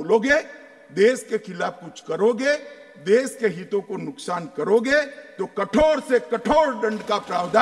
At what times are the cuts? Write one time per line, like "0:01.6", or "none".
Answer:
none